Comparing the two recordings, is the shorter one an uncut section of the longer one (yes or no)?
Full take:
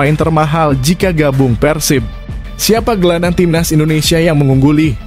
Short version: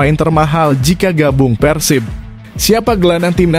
yes